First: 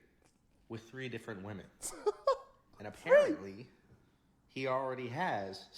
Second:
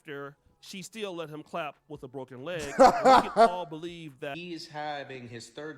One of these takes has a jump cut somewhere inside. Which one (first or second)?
second